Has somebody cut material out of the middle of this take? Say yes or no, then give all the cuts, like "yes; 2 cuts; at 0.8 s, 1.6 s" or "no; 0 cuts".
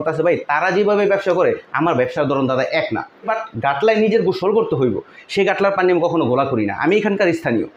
yes; 1 cut; at 3.4 s